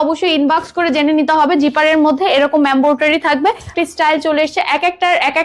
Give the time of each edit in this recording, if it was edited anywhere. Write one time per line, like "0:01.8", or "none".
0:03.7